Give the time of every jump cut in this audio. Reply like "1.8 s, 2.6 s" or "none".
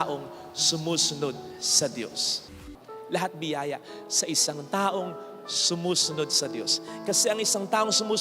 2.6 s